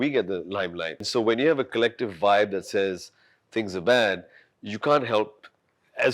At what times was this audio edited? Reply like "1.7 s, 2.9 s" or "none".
1.1 s